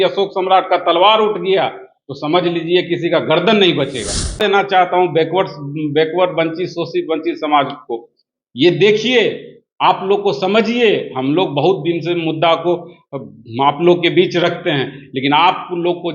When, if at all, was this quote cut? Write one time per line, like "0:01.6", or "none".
0:04.4